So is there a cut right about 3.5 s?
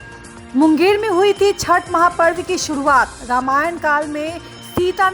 no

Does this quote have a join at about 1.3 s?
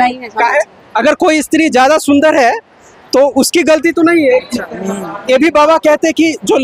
no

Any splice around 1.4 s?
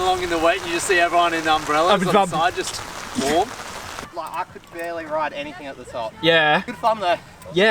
no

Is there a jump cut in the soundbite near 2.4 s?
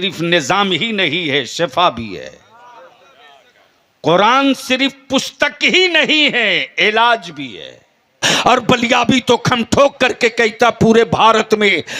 no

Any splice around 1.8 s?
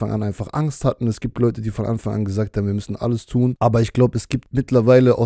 no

